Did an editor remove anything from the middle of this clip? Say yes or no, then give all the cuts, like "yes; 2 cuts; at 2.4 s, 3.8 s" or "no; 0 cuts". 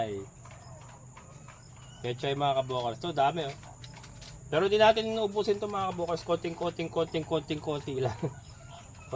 no; 0 cuts